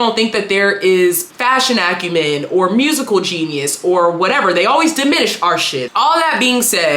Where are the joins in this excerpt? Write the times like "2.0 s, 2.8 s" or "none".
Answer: 5.8 s